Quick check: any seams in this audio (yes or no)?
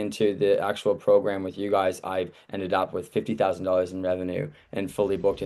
no